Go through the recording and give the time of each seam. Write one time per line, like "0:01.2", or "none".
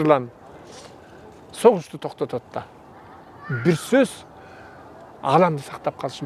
none

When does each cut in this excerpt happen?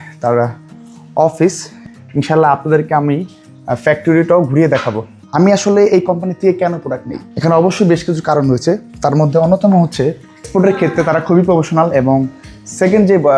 0:05.2
0:10.4

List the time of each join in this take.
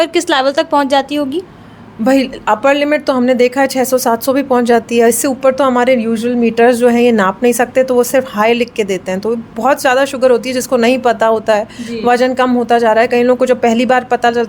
none

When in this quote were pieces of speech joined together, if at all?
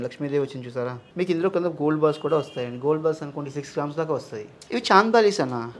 0:01.0
0:04.5

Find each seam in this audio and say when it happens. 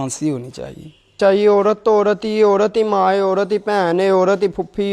0:01.2

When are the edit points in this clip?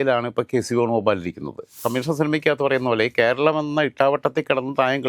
0:01.8

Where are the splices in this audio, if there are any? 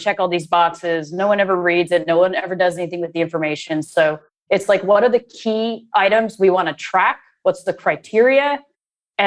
none

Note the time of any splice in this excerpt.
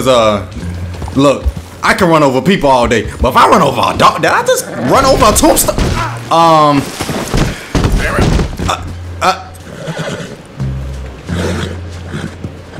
none

